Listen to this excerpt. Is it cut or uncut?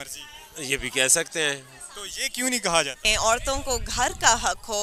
cut